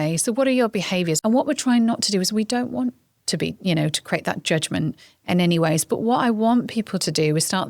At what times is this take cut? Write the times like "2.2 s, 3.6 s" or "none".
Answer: 1.2 s